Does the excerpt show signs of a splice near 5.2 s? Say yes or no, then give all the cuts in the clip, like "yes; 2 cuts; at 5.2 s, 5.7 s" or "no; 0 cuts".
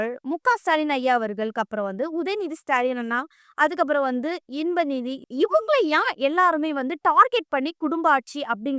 yes; 1 cut; at 5.2 s